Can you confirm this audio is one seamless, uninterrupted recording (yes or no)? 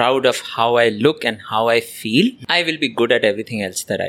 no